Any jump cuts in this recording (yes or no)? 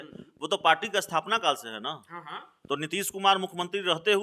no